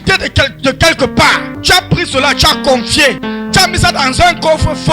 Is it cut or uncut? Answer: cut